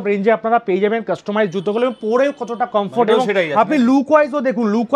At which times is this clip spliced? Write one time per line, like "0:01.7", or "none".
none